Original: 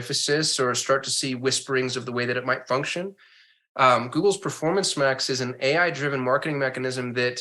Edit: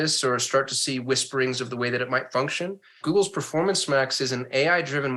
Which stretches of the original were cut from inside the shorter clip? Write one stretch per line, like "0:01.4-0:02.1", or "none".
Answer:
0:03.3-0:04.1